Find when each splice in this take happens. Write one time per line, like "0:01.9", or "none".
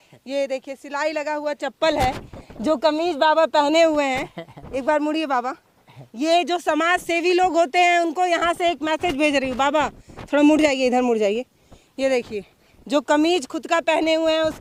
none

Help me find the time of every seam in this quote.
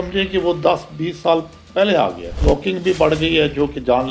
0:02.4

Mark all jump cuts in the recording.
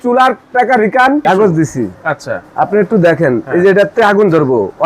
0:01.2

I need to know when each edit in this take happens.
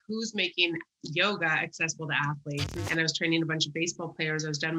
0:02.8

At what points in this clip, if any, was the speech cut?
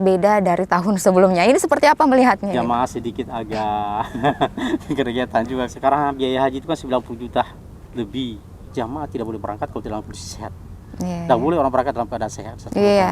0:02.5
0:05.7
0:08.6

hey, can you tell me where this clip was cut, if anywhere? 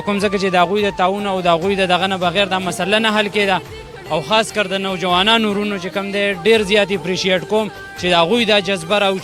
none

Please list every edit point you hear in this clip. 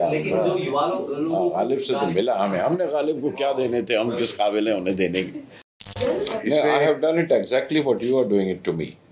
0:06.0

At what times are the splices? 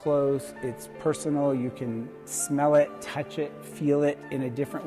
none

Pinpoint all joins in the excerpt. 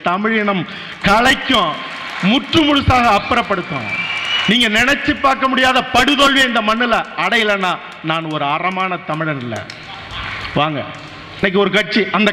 0:11.4

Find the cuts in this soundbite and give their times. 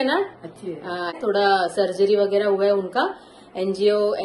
0:01.2

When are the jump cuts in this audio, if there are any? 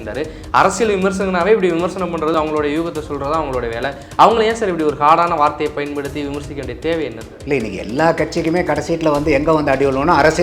0:02.3

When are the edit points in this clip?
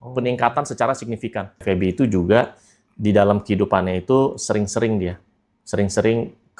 0:01.5

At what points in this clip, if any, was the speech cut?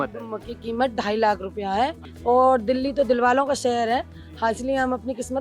0:02.1

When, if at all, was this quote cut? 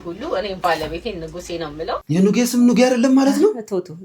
0:02.0

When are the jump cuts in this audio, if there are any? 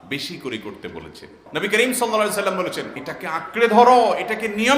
0:01.4
0:03.1

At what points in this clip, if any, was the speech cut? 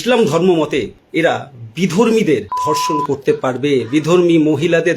0:01.0

